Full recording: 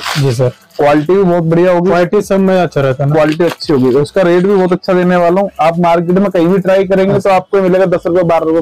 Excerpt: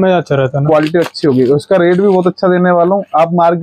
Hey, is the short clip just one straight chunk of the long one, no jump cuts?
yes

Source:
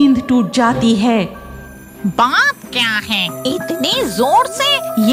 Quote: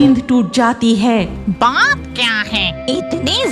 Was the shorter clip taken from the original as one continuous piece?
no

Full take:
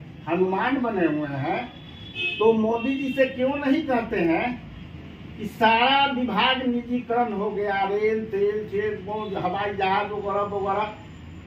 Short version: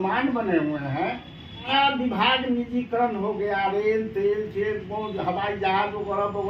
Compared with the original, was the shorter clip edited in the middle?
yes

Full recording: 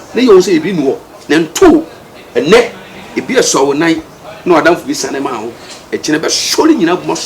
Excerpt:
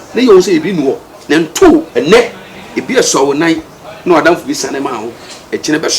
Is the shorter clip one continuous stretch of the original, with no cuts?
no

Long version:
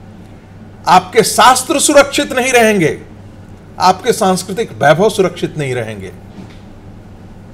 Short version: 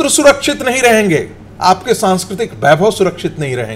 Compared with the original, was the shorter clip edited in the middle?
yes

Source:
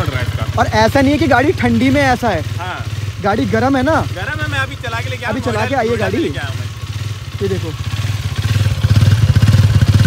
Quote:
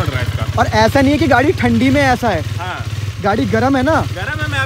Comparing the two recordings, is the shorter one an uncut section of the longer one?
yes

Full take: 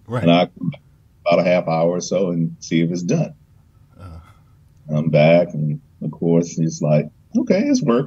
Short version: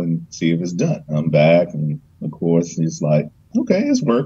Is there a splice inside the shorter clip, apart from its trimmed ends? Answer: yes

